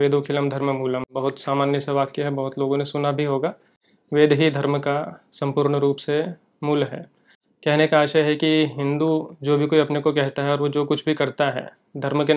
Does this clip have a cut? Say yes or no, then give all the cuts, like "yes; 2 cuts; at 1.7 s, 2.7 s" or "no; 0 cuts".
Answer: no; 0 cuts